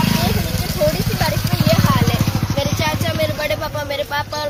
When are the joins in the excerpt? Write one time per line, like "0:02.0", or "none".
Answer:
none